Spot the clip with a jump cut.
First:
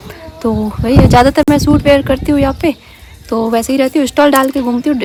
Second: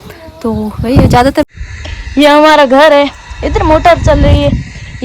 second; 1 cut; at 1.4 s

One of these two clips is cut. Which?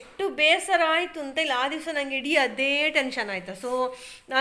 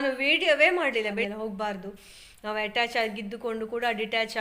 second; 1 cut; at 1.1 s

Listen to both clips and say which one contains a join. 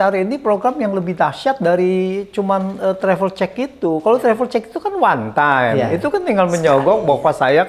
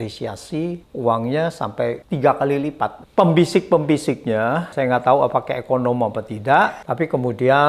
second; 5 cuts; at 0.9 s, 2.0 s, 3.0 s, 4.7 s, 6.8 s

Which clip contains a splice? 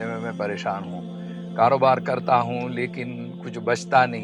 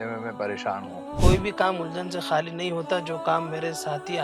second; 1 cut; at 1.2 s

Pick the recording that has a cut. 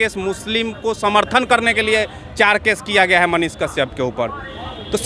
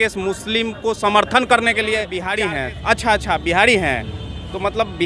second; 1 cut; at 2.3 s

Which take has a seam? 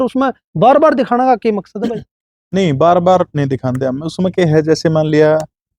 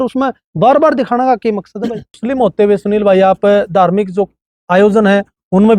second; 1 cut; at 2.2 s

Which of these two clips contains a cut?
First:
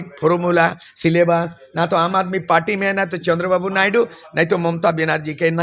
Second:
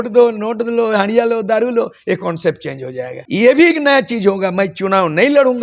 second; 1 cut; at 3.2 s

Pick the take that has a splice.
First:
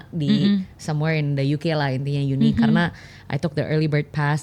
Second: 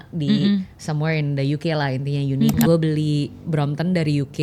second; 1 cut; at 2.7 s

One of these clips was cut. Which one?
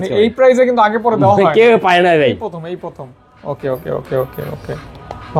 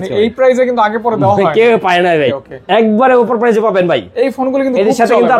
second; 1 cut; at 2.5 s

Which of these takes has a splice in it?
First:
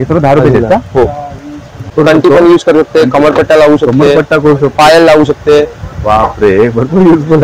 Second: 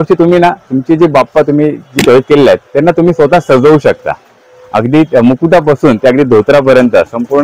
first; 1 cut; at 1.9 s

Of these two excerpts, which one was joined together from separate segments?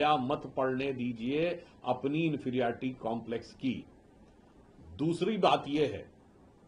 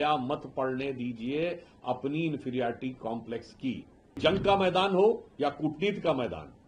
second; 1 cut; at 4.2 s

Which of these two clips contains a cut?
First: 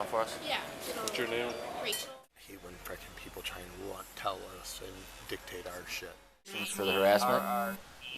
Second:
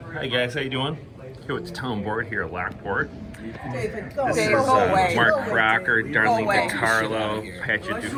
first; 2 cuts; at 2.0 s, 6.7 s

